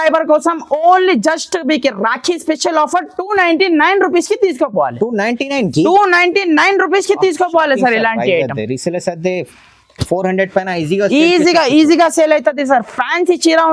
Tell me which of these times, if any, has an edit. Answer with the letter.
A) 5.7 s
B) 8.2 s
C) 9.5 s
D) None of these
D